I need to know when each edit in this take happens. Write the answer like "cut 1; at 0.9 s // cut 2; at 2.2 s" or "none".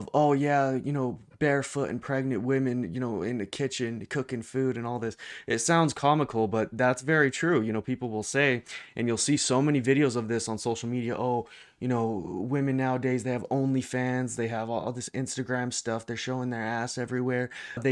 none